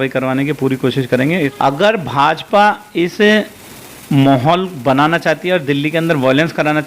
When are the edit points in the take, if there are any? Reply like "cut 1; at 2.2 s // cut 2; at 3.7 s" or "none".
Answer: cut 1; at 1.5 s